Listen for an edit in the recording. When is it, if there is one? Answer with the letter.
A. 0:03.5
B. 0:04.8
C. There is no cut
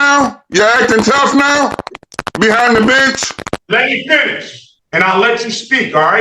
A